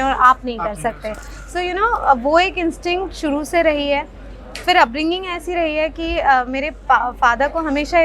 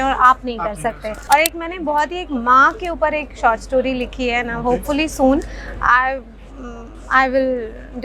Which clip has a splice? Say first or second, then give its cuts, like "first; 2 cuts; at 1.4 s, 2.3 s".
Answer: second; 1 cut; at 1.1 s